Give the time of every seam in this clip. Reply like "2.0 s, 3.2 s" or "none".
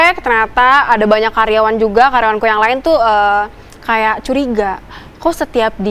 none